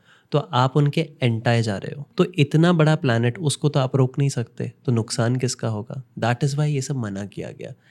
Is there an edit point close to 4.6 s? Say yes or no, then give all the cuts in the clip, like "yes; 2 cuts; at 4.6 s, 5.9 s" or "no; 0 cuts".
no; 2 cuts; at 2.0 s, 6.0 s